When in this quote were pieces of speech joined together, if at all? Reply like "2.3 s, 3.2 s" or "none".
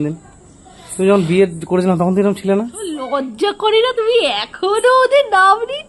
3.0 s